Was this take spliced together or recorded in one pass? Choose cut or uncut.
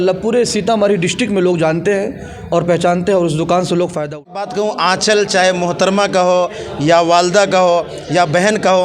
cut